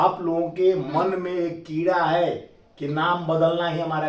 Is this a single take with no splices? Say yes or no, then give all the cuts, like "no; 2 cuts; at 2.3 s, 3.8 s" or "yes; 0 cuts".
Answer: yes; 0 cuts